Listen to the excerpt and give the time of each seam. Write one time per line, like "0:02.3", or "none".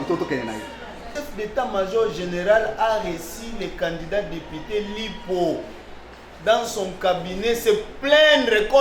0:01.2
0:05.8